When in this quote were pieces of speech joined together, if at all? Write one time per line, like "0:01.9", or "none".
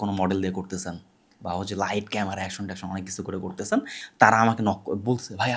0:04.0

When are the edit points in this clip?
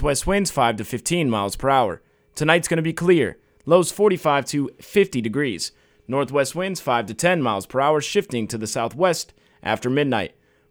none

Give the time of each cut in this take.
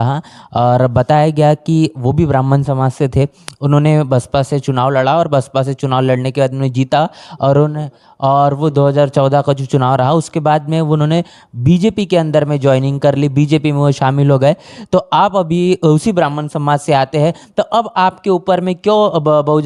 none

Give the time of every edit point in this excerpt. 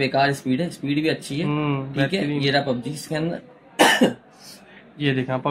none

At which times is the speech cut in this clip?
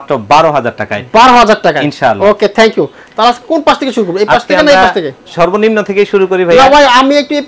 none

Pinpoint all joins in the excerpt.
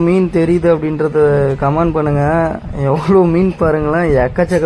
none

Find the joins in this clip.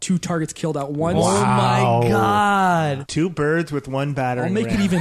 0:03.0

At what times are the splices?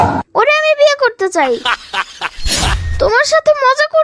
0:02.8

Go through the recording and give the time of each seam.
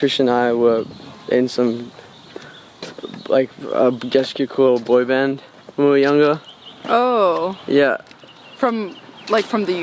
none

